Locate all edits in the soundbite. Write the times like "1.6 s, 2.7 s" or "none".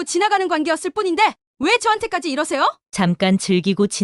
2.8 s